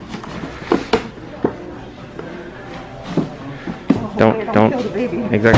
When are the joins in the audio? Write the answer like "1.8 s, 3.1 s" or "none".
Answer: none